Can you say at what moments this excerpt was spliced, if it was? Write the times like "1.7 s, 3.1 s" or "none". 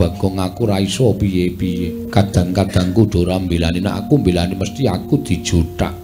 2.0 s